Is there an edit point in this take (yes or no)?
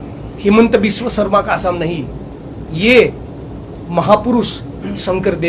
no